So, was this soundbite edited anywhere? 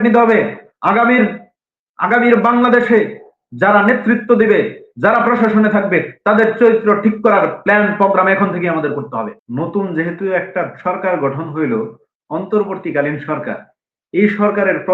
yes; 1 cut; at 9.4 s

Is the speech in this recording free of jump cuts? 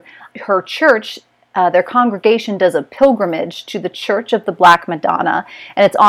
yes; 0 cuts

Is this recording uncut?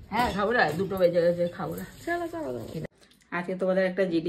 no; 1 cut; at 2.8 s

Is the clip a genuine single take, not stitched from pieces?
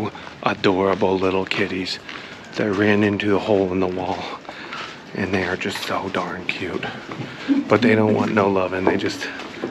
yes; 0 cuts

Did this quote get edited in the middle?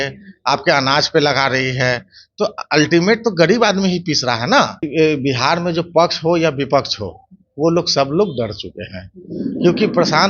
yes; 1 cut; at 4.9 s

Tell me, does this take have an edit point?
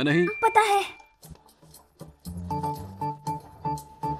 no; 0 cuts

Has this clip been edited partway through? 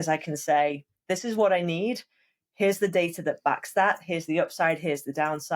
no; 0 cuts

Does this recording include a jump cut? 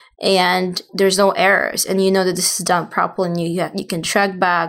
no; 0 cuts

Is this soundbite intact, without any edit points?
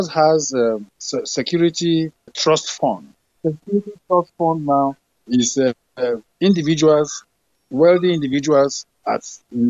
yes; 0 cuts

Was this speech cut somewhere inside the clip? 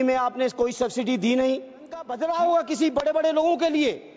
yes; 1 cut; at 2.1 s

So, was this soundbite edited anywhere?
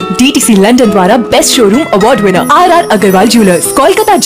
no; 0 cuts

